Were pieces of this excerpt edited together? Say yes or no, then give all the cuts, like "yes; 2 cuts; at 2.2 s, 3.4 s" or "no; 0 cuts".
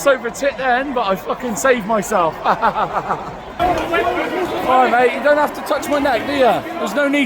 yes; 1 cut; at 3.6 s